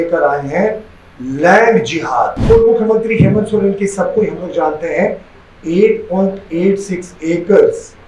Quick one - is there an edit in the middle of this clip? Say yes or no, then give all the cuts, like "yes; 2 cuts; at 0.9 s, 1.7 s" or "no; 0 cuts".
yes; 1 cut; at 2.4 s